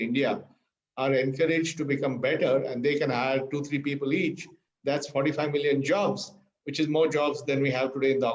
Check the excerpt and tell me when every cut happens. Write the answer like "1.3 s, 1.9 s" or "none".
none